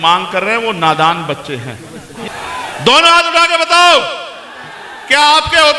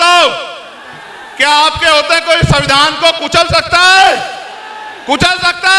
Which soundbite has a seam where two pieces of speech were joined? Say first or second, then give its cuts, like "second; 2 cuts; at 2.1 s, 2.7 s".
first; 1 cut; at 2.1 s